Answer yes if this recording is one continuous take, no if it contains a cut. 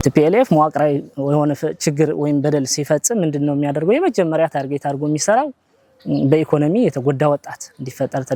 yes